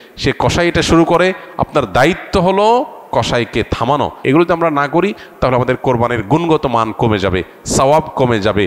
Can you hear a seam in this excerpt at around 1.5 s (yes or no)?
no